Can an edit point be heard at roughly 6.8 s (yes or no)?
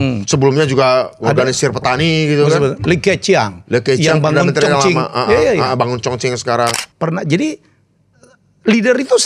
yes